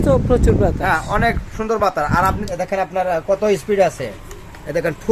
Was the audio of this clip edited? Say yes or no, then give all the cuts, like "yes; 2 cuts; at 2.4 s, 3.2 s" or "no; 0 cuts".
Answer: yes; 1 cut; at 2.5 s